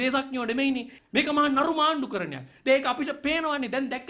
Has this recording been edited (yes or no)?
yes